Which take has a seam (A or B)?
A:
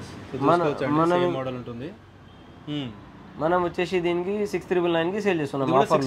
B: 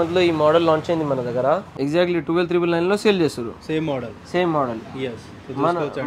B